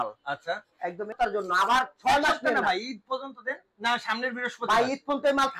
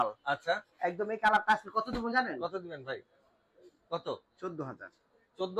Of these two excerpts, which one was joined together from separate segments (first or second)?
first